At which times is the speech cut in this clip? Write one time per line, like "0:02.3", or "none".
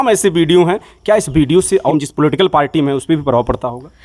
0:01.9